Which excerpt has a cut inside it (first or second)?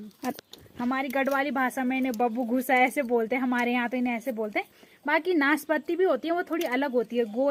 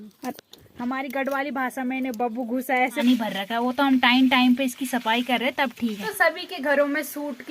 second